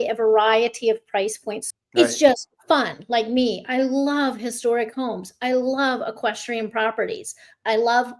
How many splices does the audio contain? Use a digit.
1